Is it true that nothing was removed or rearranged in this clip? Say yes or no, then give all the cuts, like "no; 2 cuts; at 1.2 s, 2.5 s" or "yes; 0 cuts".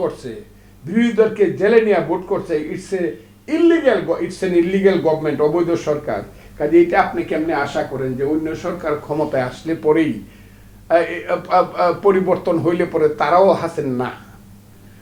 yes; 0 cuts